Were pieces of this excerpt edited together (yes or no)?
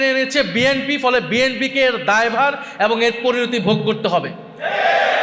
no